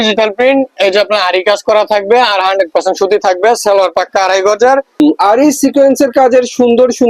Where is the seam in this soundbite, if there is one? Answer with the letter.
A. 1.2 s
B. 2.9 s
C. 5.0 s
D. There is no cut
C